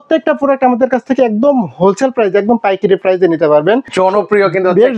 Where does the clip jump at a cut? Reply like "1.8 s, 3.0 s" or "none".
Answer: 3.9 s

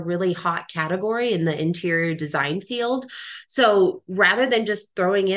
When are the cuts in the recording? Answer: none

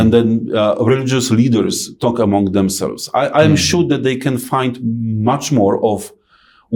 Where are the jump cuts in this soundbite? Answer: none

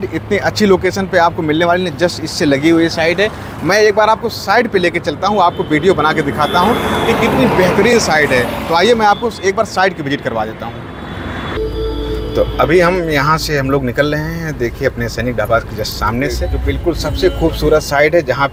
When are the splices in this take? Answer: none

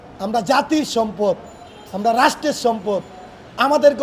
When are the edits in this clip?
none

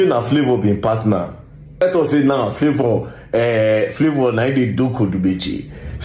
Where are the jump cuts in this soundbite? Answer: 1.8 s

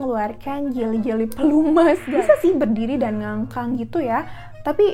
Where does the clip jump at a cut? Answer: 2.0 s

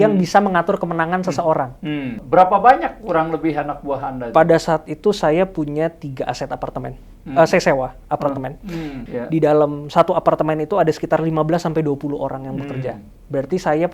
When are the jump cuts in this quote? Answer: 2.2 s, 9.0 s

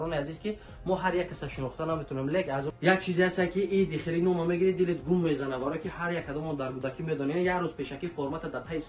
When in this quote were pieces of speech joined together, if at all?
2.7 s

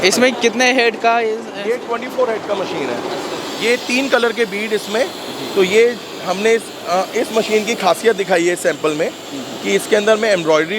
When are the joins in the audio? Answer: 3.4 s

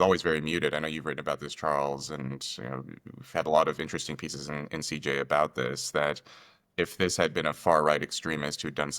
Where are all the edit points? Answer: none

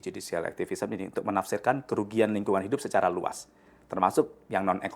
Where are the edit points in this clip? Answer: none

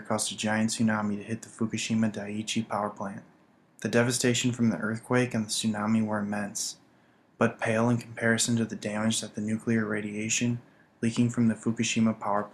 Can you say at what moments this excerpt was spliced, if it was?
9.9 s

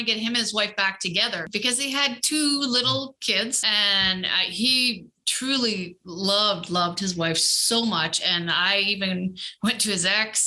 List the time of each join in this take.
1.5 s, 3.6 s

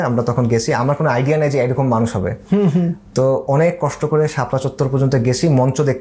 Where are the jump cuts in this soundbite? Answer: none

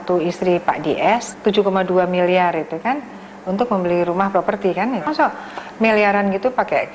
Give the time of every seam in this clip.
1.3 s, 5.1 s

